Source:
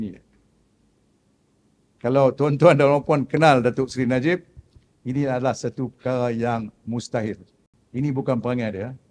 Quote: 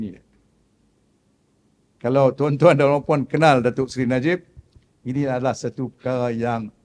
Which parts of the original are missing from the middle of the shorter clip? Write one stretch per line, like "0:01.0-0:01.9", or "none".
none